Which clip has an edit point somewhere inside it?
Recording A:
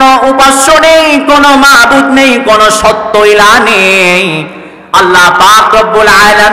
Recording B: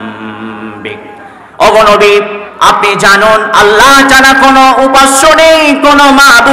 B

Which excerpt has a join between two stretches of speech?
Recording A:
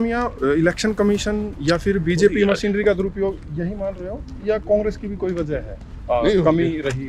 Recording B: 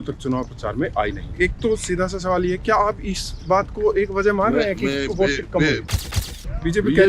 B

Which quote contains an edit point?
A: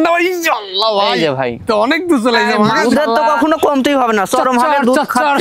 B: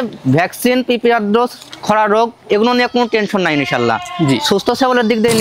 A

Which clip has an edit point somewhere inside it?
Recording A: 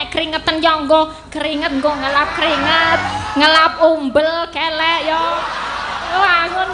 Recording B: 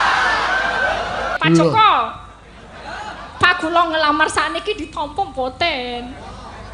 B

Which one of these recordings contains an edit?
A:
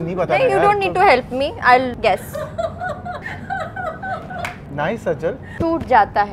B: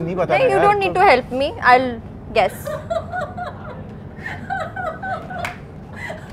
A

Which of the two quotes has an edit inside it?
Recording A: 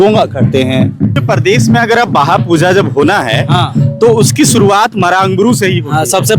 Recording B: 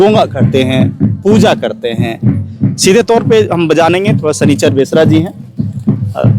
A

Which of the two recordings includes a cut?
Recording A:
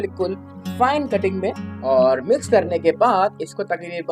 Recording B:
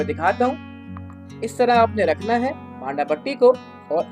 A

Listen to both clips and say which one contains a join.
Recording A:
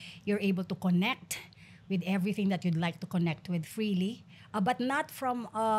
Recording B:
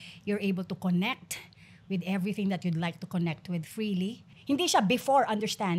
B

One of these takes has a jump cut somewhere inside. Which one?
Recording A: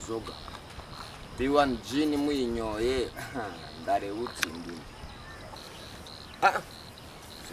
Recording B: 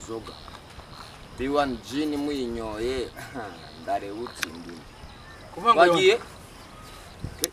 A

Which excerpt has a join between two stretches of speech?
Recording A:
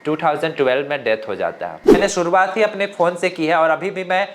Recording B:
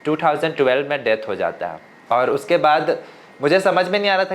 A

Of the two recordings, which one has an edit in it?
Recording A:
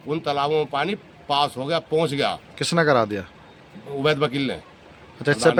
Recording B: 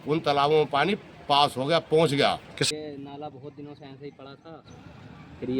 B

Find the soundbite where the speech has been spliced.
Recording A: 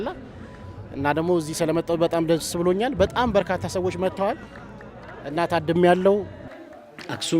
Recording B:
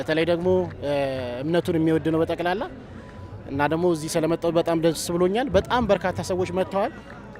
A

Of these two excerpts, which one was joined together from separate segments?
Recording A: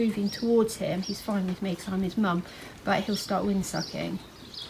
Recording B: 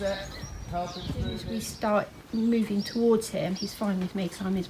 B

